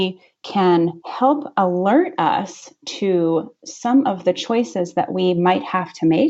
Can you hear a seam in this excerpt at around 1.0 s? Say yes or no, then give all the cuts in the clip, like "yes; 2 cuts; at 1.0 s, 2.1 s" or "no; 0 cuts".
no; 0 cuts